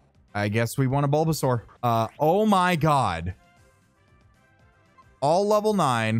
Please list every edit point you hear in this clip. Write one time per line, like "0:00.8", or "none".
0:01.7
0:04.9